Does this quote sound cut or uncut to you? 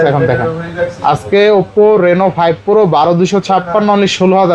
uncut